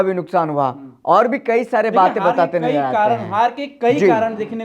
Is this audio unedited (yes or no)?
yes